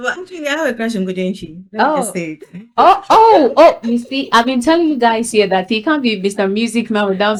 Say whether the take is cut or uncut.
uncut